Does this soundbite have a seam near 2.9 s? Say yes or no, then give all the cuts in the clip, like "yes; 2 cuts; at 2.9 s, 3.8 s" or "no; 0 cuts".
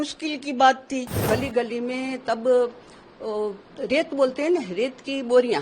no; 1 cut; at 1.2 s